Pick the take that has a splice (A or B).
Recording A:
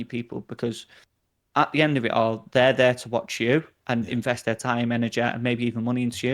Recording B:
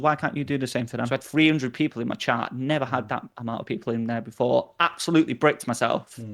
B